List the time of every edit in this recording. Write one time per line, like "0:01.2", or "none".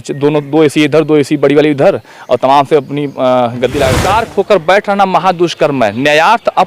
0:04.0

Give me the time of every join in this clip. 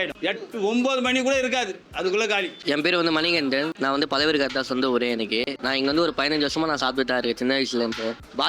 none

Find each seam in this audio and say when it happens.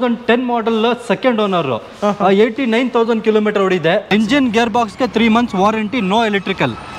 0:04.1

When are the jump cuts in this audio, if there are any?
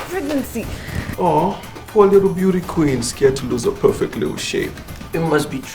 0:01.1

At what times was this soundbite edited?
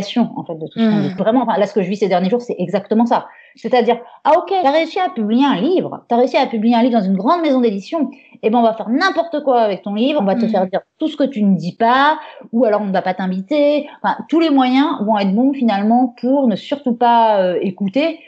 0:01.2

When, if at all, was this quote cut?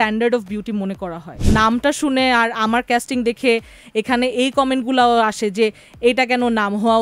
0:01.3

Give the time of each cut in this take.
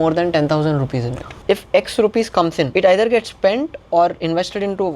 0:01.4
0:02.7

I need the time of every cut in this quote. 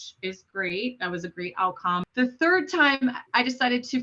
0:02.1

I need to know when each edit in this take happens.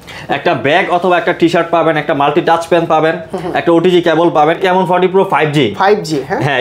0:04.6

